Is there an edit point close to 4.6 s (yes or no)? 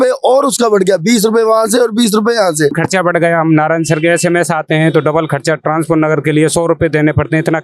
no